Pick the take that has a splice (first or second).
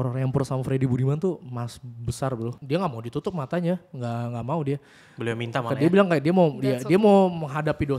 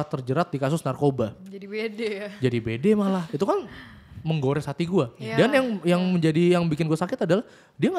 first